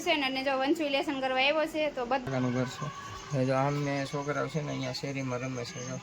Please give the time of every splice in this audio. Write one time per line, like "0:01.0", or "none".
0:02.3

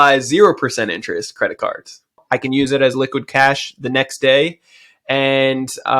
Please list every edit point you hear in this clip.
0:02.2

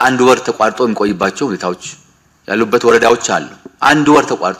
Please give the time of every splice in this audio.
none

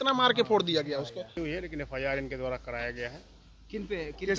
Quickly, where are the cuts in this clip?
0:01.4

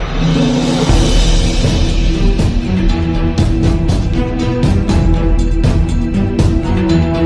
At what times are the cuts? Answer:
none

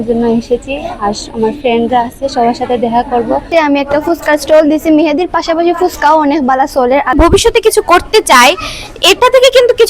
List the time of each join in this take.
0:03.5
0:07.1

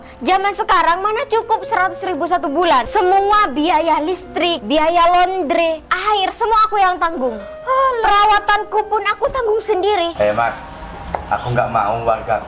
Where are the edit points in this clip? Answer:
0:02.9
0:04.6
0:05.9
0:10.1

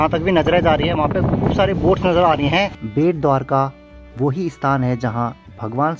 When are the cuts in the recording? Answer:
0:02.8

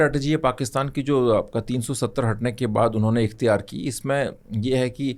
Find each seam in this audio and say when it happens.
none

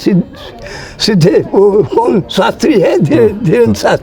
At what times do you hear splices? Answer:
none

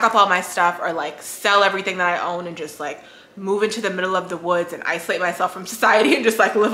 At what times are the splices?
none

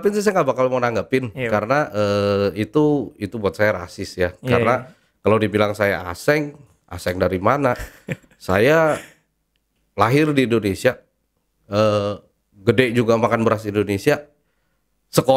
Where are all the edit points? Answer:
none

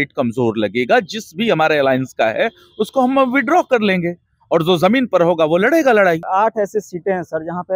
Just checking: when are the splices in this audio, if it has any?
0:06.2

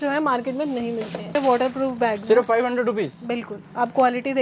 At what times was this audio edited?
0:01.3

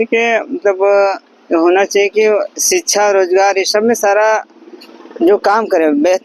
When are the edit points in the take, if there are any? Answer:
none

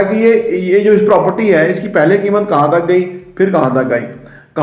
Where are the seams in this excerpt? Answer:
none

